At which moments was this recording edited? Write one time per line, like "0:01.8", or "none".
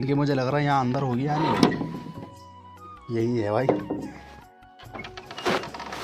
none

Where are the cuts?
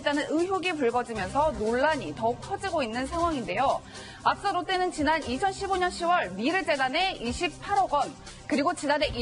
0:06.6

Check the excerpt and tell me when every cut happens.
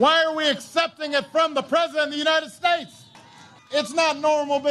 0:03.5

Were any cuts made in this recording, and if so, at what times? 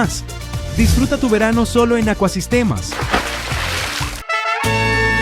0:04.2

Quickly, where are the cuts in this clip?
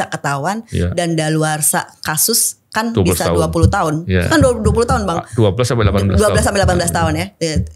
none

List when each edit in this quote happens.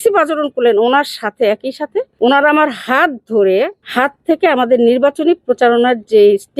0:02.1
0:03.8

